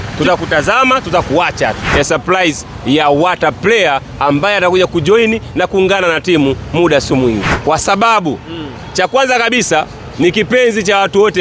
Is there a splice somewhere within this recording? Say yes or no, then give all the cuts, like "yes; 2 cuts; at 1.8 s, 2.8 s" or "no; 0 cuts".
yes; 2 cuts; at 1.9 s, 7.5 s